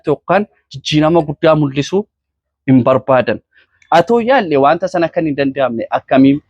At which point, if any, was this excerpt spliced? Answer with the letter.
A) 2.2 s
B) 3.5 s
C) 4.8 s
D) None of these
B